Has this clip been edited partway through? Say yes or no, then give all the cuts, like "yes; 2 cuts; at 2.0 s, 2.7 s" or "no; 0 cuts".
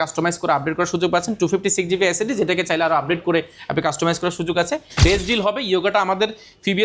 yes; 1 cut; at 4.8 s